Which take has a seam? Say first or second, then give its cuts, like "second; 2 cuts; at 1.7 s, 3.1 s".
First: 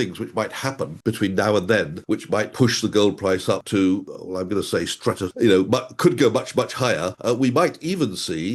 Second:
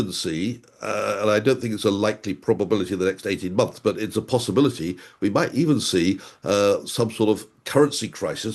first; 6 cuts; at 0.9 s, 2.2 s, 3.6 s, 4.1 s, 5.3 s, 7.1 s